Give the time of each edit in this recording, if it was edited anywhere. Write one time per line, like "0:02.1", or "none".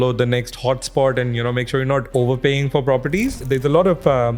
0:02.1
0:03.4

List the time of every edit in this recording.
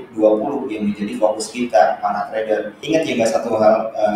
0:02.8

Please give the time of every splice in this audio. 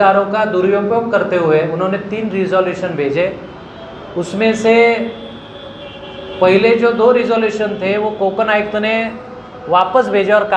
none

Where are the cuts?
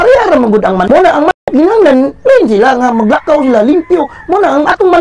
0:01.3

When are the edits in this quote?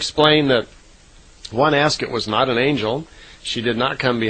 0:03.1

